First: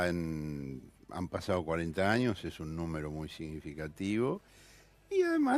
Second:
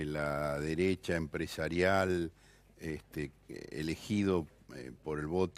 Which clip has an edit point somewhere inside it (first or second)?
second